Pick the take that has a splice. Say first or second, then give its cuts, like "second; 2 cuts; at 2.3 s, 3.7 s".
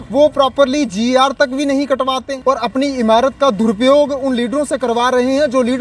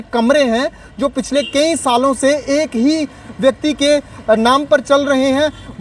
first; 1 cut; at 2.3 s